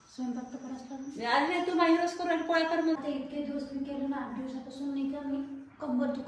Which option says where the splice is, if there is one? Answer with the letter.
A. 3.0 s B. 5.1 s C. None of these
A